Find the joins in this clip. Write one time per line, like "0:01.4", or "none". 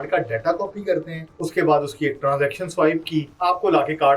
0:01.2
0:03.3